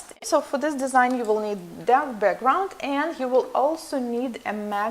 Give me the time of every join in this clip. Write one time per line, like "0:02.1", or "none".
0:02.0